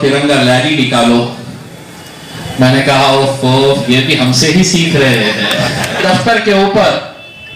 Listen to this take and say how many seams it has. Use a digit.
1